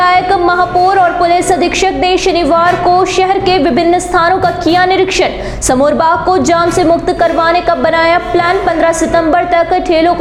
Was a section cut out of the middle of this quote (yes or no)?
no